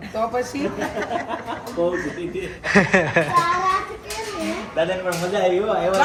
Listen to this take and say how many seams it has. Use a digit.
0